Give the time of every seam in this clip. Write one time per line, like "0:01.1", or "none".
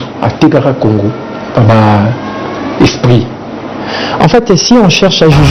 none